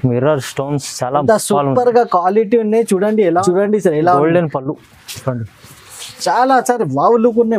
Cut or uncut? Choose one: cut